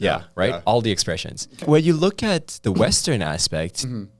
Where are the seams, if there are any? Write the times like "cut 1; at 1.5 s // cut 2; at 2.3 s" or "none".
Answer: cut 1; at 1.6 s